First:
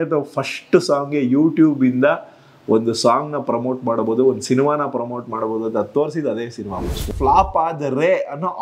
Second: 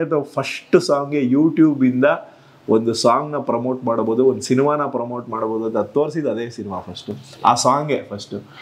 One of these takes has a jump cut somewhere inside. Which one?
first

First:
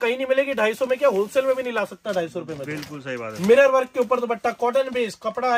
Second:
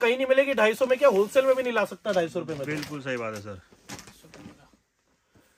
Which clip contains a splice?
first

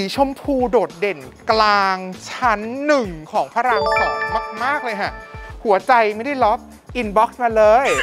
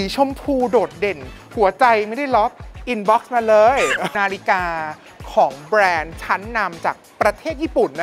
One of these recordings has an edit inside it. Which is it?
second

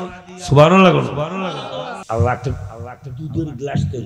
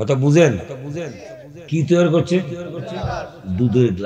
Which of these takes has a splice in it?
first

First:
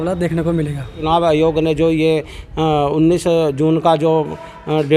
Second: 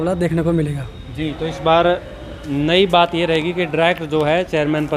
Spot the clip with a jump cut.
first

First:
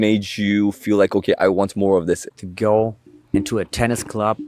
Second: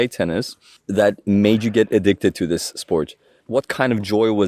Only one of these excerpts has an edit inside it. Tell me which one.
first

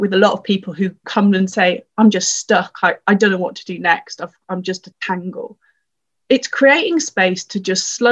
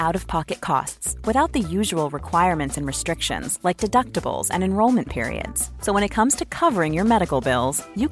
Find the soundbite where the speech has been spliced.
first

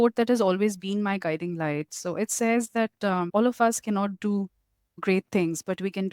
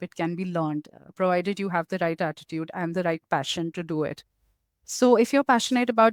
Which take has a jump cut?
first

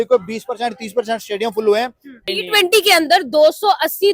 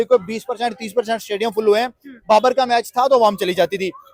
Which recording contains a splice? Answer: first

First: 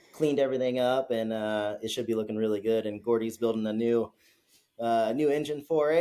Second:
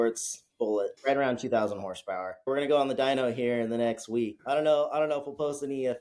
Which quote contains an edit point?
second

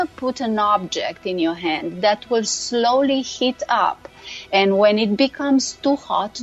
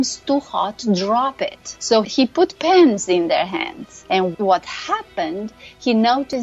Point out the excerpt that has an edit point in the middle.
second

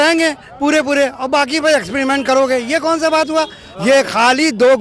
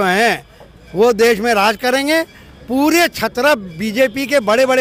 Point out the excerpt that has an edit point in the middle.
first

